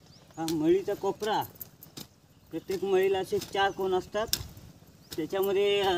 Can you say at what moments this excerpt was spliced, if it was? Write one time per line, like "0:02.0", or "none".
none